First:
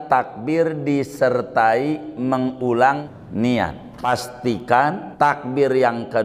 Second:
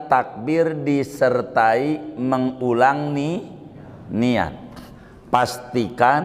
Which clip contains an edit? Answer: first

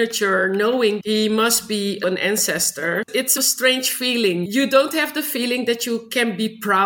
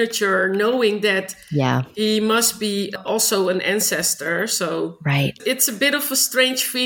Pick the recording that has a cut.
first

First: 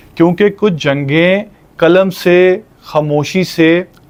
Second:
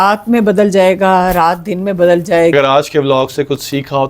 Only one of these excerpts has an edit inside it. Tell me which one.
second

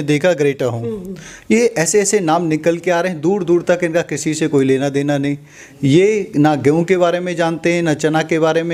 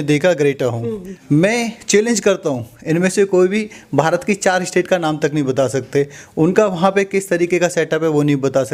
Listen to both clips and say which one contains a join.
second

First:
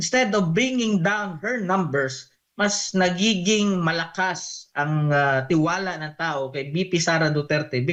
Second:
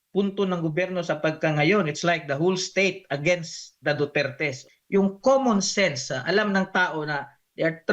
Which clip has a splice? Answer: second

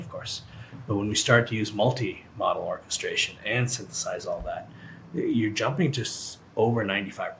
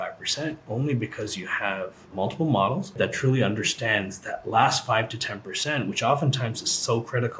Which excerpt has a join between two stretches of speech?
second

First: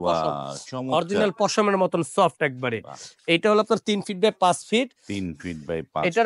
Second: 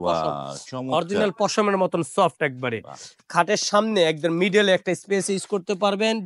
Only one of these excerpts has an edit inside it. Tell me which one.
second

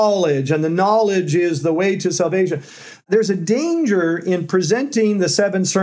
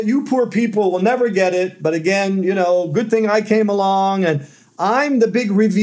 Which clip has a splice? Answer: first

